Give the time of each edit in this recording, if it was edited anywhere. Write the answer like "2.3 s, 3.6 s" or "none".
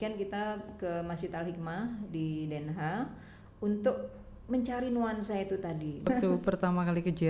6.1 s